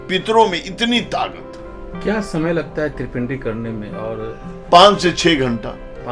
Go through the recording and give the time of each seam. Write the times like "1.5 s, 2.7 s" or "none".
none